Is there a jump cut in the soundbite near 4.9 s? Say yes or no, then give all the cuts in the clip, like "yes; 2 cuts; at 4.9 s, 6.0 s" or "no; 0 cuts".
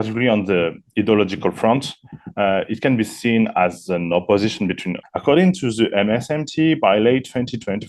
yes; 1 cut; at 4.9 s